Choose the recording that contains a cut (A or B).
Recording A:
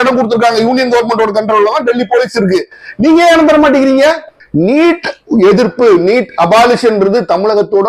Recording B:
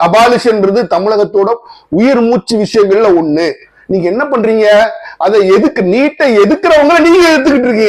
A